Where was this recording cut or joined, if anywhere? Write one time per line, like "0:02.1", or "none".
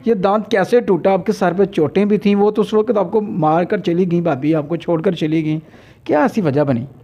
none